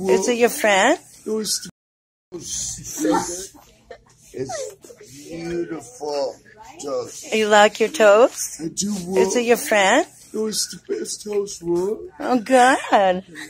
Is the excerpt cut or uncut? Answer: cut